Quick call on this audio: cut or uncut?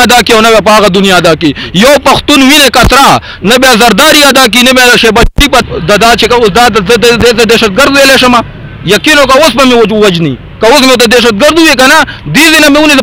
cut